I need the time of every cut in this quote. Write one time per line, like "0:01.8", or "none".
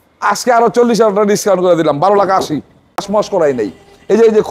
0:03.0